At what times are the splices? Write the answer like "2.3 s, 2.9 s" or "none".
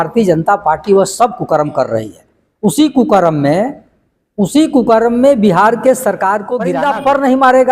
6.7 s